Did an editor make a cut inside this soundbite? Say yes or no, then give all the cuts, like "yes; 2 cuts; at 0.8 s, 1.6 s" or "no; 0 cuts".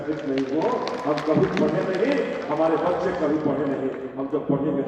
no; 0 cuts